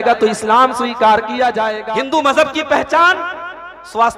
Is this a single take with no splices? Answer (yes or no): no